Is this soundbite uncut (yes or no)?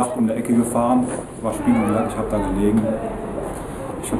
yes